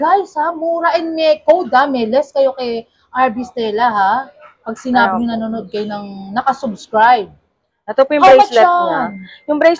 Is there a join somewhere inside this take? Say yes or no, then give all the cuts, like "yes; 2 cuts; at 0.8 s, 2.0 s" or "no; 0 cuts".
no; 0 cuts